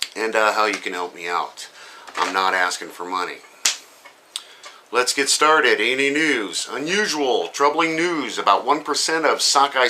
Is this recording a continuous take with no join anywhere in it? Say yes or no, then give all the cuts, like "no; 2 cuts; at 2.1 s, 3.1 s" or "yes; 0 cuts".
no; 1 cut; at 6.9 s